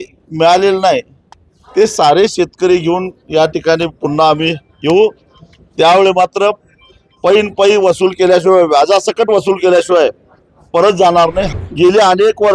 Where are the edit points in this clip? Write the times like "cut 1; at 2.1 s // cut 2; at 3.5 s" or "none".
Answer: cut 1; at 11.5 s